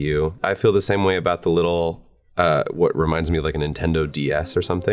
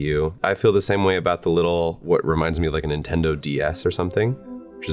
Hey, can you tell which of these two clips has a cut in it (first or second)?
second